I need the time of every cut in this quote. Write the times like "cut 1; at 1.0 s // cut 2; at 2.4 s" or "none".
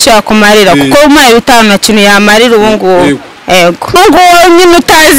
cut 1; at 3.9 s